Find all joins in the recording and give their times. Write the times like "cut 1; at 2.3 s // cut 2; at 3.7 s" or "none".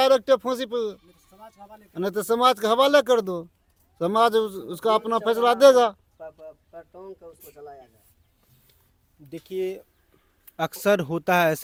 none